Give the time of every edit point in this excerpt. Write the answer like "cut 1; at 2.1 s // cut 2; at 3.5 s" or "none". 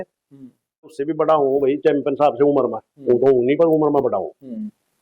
cut 1; at 1.0 s